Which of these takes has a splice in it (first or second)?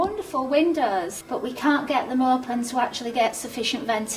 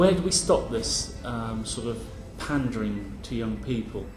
first